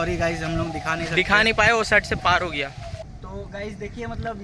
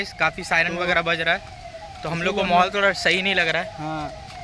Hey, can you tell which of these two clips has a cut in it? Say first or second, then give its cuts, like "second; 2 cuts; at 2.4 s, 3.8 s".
first; 1 cut; at 3.1 s